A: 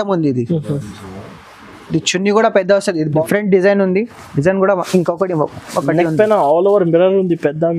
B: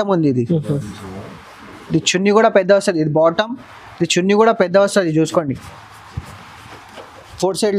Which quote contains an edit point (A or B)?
A